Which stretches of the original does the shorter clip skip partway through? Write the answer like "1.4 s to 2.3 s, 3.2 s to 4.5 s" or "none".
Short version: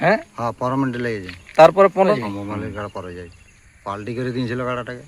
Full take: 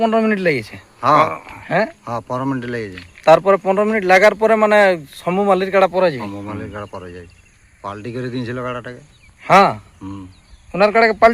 3.9 s to 6.1 s